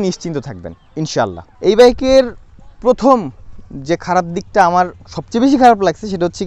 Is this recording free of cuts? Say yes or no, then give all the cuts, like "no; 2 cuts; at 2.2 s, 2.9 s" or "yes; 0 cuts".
yes; 0 cuts